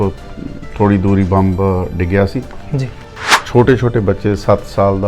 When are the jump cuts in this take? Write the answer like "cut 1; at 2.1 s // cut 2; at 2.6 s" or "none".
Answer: cut 1; at 3.3 s